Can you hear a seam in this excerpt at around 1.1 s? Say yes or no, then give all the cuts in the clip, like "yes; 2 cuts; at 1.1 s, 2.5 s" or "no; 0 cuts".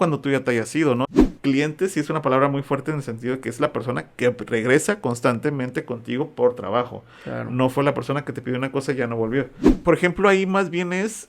yes; 2 cuts; at 1.1 s, 9.7 s